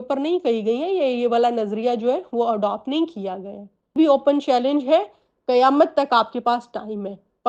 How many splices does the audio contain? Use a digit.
1